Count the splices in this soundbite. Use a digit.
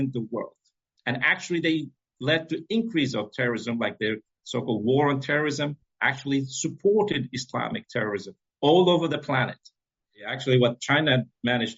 1